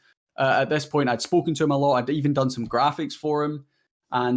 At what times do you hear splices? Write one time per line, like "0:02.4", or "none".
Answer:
none